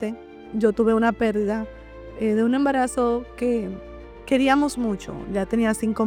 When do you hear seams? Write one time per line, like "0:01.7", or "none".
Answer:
none